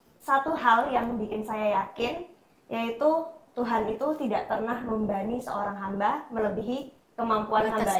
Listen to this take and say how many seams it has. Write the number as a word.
zero